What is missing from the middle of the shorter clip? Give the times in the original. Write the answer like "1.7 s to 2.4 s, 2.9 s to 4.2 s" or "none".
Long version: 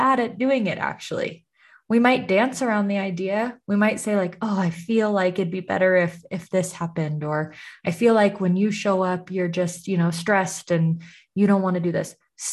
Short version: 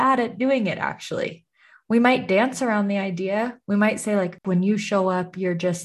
4.4 s to 8.4 s